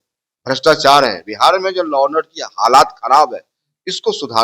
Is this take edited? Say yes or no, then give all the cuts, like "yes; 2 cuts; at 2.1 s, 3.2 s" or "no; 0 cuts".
no; 0 cuts